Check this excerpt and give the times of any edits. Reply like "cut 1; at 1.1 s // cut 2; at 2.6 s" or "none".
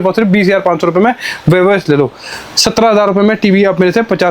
none